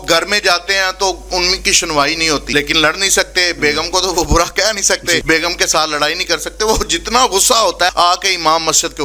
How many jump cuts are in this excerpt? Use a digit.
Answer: 3